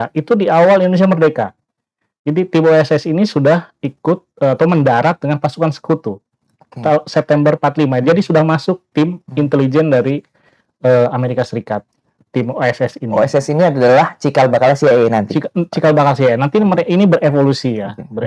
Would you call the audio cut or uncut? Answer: uncut